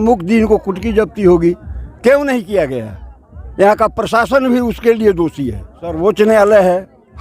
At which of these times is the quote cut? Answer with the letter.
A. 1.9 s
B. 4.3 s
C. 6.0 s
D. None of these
C